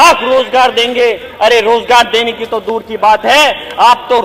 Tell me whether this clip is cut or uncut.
uncut